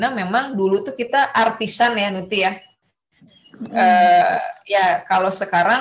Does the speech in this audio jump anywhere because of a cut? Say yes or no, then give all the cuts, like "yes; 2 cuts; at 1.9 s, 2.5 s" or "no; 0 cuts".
no; 0 cuts